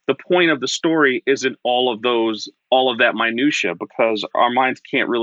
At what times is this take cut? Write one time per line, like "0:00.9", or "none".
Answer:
0:04.3